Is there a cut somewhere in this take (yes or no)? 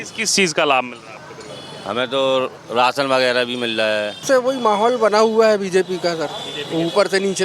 yes